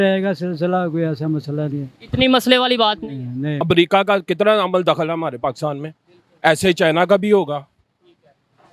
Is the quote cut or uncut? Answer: cut